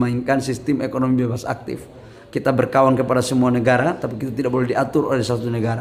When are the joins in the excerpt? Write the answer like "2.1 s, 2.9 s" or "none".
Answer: none